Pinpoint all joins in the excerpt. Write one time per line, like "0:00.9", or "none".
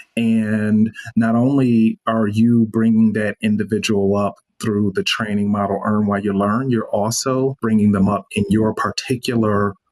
0:07.6